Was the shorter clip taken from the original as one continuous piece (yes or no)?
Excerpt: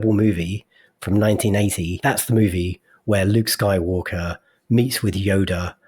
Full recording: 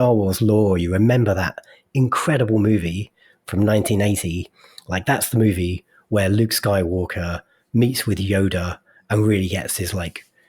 no